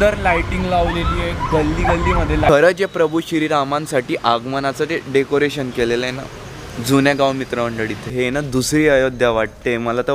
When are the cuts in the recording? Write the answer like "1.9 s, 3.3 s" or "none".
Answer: 2.5 s, 8.1 s

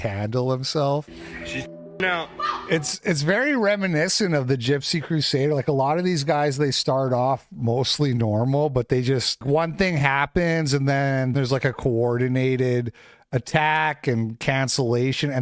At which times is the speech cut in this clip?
1.1 s, 9.4 s, 11.3 s

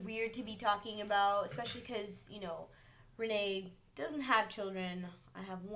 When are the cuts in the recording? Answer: none

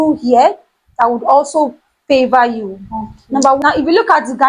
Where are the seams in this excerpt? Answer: 3.6 s

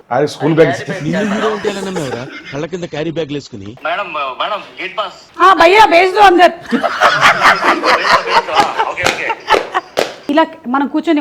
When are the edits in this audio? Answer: 3.8 s, 10.3 s

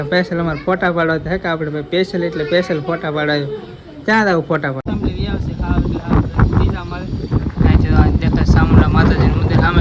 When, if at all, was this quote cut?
4.8 s

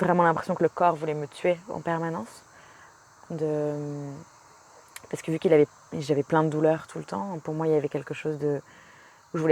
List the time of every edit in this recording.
none

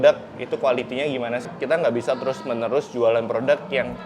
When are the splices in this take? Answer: 1.5 s

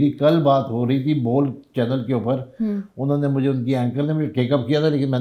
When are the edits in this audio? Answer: none

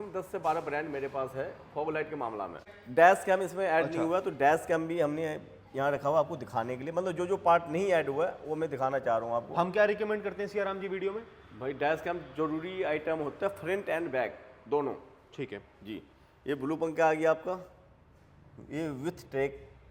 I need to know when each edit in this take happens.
none

